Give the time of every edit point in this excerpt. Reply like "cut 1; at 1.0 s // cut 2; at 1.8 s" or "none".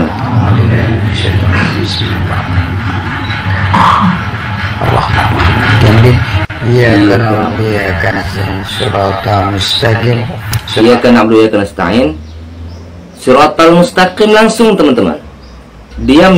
none